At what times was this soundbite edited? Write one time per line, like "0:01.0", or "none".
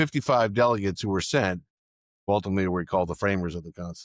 0:02.3